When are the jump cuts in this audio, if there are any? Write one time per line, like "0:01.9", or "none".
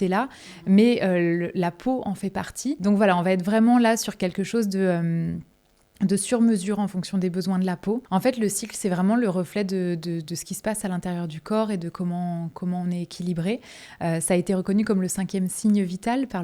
0:02.8
0:08.0